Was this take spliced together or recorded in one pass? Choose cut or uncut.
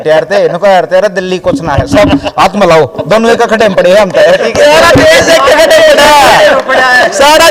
uncut